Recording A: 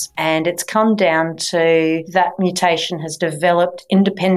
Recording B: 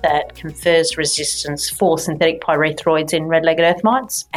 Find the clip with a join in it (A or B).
A